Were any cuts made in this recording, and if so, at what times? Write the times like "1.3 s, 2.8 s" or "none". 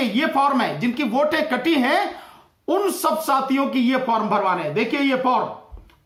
none